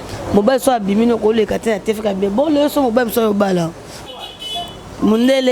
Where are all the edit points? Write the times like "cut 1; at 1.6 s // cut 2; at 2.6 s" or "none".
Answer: cut 1; at 4.1 s